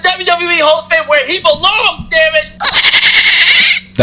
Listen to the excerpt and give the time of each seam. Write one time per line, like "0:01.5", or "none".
0:02.5